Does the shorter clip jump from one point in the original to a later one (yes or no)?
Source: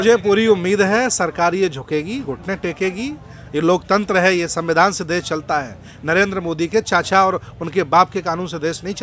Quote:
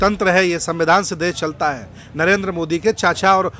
no